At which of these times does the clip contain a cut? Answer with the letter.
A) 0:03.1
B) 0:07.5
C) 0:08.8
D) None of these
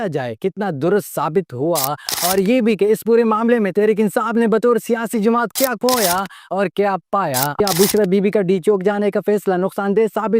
B